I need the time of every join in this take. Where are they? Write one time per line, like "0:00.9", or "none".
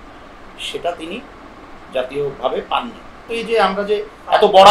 0:03.3